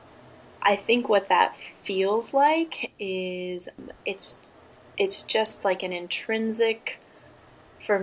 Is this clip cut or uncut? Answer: uncut